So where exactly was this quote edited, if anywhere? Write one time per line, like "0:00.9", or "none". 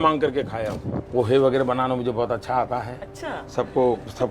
0:01.1